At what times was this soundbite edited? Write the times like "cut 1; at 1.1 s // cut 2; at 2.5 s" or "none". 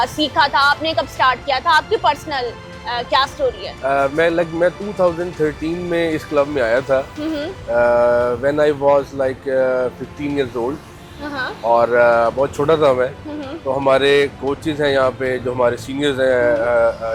none